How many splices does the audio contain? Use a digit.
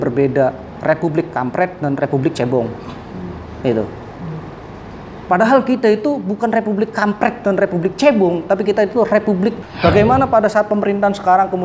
1